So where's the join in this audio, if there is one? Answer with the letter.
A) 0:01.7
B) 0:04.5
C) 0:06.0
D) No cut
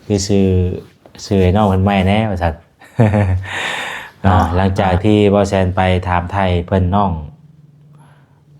B